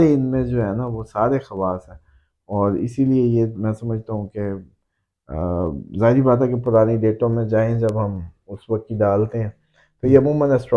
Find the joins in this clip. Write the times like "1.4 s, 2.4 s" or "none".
none